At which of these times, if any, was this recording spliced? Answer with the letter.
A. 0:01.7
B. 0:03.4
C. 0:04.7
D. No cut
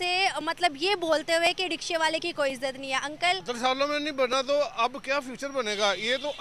B